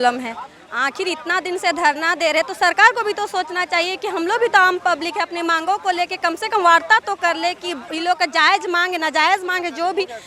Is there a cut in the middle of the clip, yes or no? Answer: no